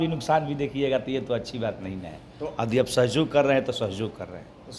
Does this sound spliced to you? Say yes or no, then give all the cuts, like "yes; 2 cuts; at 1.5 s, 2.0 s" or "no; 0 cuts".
no; 0 cuts